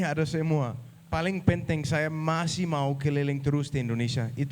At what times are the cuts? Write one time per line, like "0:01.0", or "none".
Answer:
0:00.9